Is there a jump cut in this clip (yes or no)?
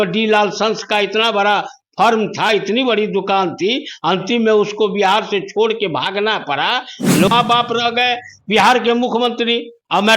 yes